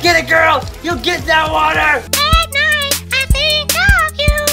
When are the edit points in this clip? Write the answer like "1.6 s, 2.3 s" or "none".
2.1 s